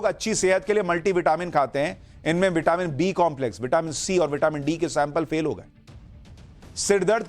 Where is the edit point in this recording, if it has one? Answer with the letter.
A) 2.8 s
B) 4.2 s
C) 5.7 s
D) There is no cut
A